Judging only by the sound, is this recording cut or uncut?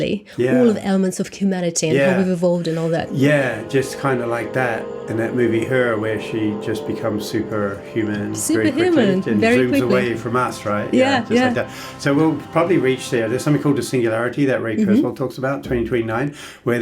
uncut